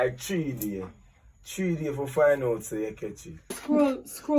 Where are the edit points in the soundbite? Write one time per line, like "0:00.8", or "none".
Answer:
0:03.5